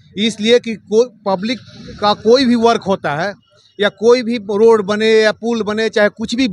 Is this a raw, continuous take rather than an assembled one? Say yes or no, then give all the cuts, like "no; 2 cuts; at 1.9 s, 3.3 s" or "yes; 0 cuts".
yes; 0 cuts